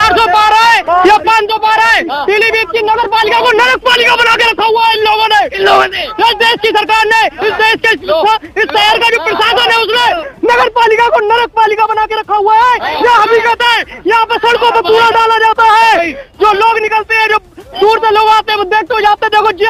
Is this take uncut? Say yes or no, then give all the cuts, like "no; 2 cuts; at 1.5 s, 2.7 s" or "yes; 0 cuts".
yes; 0 cuts